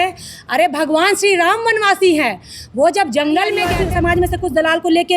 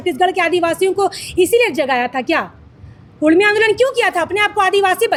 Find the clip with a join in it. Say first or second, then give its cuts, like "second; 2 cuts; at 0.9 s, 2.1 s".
first; 1 cut; at 3.7 s